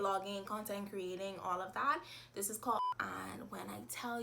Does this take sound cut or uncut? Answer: cut